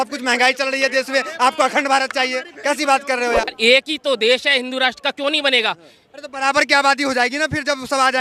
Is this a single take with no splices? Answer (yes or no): no